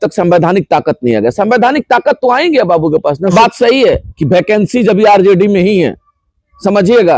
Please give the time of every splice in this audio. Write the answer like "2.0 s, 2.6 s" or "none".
3.3 s